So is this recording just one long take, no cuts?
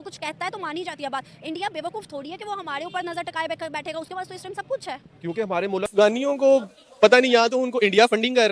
no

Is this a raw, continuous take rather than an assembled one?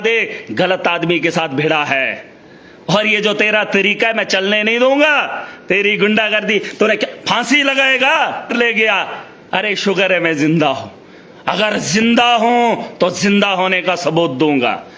no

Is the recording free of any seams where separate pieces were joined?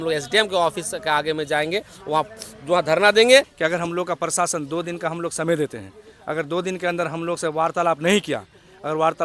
no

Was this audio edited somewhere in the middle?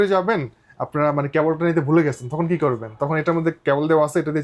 no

